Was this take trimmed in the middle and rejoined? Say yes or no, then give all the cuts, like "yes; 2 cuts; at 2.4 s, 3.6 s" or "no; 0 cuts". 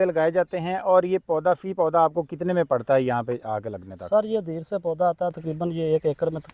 no; 0 cuts